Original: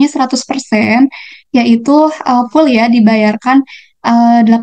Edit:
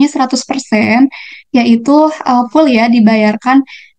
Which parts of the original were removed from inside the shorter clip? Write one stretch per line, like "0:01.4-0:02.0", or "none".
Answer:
none